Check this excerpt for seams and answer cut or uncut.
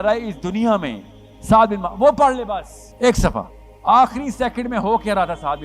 cut